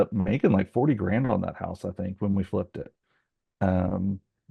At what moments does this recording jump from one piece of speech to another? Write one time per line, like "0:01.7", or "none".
none